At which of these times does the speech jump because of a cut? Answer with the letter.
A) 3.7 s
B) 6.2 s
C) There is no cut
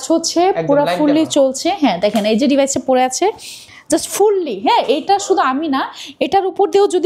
C